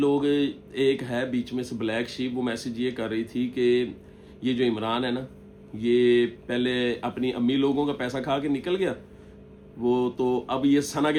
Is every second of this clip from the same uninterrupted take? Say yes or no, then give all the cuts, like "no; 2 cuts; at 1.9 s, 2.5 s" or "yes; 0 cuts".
yes; 0 cuts